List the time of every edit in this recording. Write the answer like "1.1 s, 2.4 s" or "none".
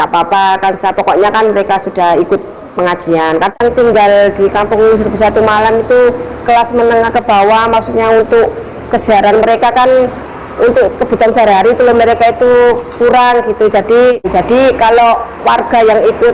3.6 s, 14.3 s